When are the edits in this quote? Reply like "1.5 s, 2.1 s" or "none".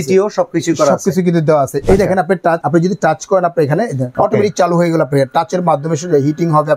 1.8 s, 2.6 s, 4.1 s